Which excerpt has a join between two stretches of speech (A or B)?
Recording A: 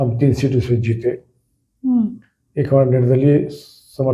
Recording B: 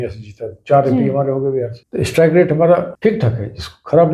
B